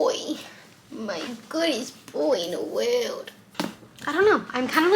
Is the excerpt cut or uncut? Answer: cut